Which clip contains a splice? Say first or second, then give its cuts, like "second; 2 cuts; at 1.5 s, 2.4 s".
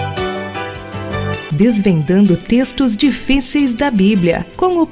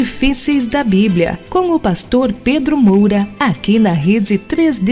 second; 1 cut; at 3.3 s